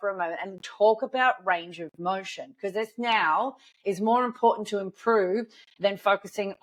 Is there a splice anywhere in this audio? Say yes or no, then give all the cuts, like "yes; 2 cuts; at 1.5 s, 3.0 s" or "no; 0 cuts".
no; 0 cuts